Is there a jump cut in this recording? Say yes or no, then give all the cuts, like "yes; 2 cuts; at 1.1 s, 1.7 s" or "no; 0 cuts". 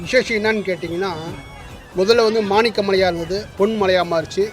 yes; 1 cut; at 3.5 s